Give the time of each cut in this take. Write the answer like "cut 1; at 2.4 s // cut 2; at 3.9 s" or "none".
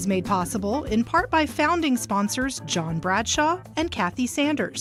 none